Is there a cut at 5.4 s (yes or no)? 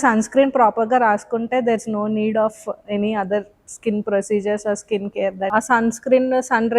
yes